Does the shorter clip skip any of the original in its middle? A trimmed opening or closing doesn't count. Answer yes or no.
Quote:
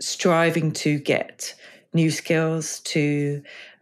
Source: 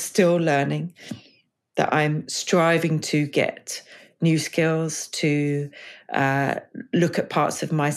no